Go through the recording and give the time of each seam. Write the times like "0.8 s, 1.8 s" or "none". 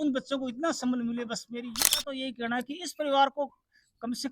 2.1 s